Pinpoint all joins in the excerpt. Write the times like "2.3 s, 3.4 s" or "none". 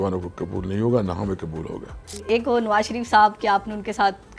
2.2 s